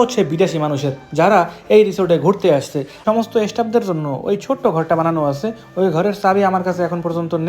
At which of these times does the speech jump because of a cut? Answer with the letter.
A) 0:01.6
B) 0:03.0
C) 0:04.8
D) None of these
B